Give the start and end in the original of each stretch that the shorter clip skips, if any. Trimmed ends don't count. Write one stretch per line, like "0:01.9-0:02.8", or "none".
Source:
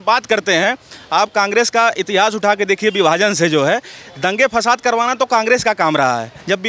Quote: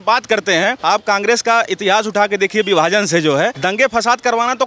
0:00.8-0:01.1
0:03.9-0:04.2